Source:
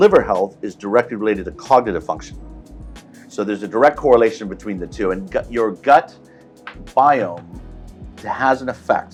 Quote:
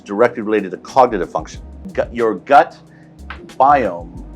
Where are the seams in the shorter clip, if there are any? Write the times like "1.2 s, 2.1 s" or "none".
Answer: 1.9 s